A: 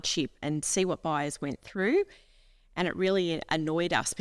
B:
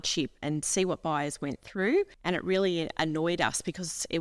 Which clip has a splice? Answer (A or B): B